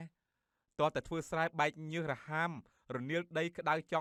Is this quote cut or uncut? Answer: uncut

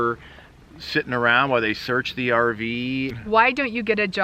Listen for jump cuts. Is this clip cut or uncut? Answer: cut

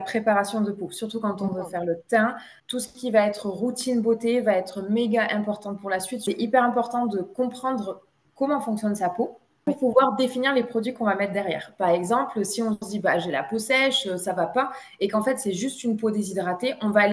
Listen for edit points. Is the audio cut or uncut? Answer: cut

